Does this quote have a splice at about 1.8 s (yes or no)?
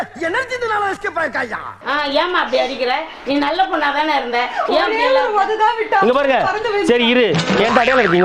yes